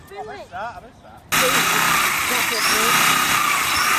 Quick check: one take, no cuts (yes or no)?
no